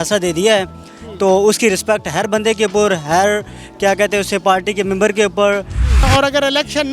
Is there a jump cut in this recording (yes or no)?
yes